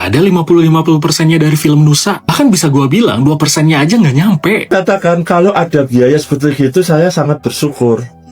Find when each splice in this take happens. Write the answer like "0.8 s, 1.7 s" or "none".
4.6 s